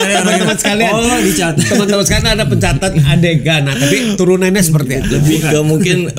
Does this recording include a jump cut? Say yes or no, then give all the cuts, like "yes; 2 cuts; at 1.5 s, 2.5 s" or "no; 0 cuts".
yes; 1 cut; at 5.1 s